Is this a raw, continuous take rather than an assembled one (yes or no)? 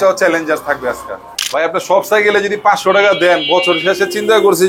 no